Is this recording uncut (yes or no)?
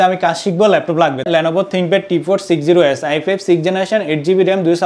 no